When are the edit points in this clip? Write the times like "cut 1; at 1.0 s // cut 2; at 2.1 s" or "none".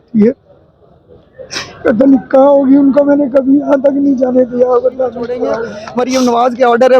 cut 1; at 5.8 s